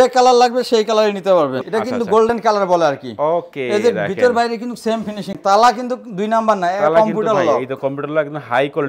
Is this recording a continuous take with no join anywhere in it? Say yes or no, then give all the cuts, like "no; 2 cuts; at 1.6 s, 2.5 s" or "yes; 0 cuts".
no; 2 cuts; at 1.6 s, 5.3 s